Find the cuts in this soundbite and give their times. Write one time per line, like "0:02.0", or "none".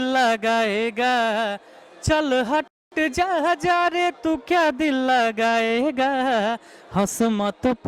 none